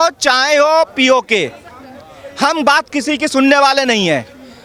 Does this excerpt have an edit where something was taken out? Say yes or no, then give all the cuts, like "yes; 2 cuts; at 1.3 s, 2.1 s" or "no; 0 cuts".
no; 0 cuts